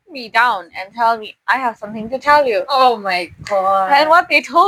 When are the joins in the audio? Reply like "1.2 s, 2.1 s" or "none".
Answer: none